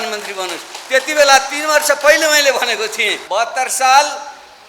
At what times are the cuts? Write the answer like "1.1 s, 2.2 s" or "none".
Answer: 3.2 s